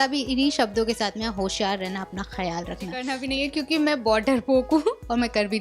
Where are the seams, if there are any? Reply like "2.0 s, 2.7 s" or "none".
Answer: 3.1 s